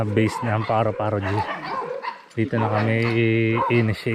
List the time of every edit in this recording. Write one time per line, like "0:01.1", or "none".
none